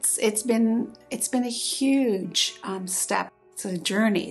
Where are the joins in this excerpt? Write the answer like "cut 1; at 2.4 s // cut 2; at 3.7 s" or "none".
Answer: cut 1; at 3.3 s